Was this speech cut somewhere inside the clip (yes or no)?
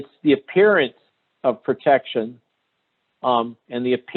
no